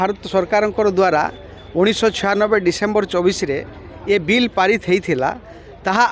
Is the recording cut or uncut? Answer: uncut